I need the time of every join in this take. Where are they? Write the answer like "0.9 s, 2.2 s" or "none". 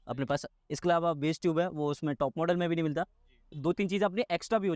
3.5 s